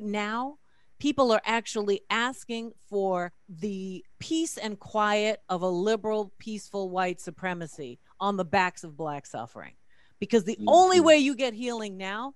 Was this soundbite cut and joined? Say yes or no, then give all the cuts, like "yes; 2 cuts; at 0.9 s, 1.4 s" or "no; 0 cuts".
yes; 1 cut; at 3.4 s